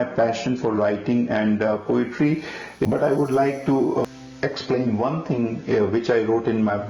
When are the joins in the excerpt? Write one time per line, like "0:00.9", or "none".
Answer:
0:02.8
0:04.0